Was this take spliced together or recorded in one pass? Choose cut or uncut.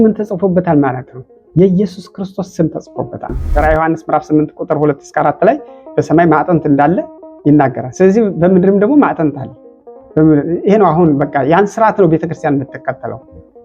cut